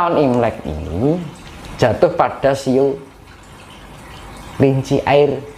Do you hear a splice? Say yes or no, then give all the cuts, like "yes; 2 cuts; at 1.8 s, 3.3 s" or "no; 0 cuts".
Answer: no; 0 cuts